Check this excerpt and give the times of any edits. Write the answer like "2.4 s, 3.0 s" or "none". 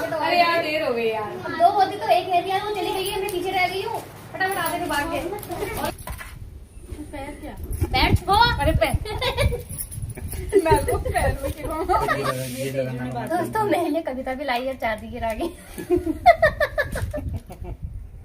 5.9 s, 12.1 s